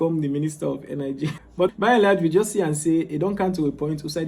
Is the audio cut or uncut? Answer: cut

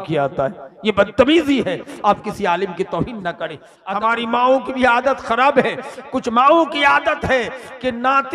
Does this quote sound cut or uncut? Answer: cut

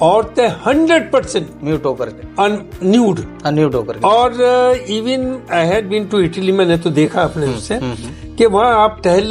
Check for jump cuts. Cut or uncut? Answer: uncut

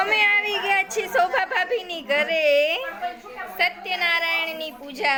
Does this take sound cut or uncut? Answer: uncut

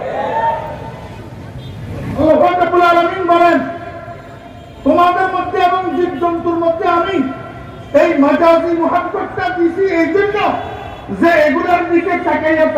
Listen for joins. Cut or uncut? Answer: cut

